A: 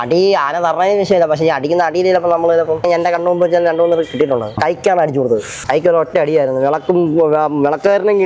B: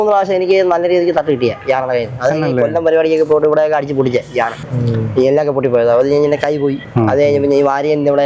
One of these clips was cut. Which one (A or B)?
A